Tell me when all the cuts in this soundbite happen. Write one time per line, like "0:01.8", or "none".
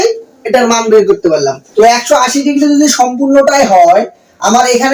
0:01.6